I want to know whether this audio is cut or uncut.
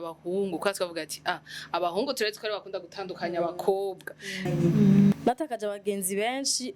cut